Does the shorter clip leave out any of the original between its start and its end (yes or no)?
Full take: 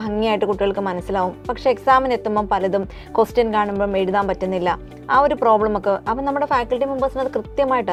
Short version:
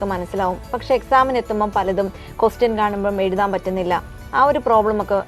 no